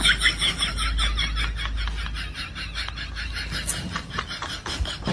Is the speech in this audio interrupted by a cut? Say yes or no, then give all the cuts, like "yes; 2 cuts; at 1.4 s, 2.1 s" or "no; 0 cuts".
no; 0 cuts